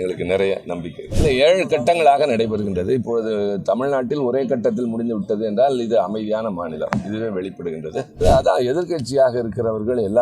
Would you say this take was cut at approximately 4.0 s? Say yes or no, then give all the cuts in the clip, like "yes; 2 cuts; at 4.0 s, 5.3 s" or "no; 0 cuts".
no; 2 cuts; at 1.1 s, 8.2 s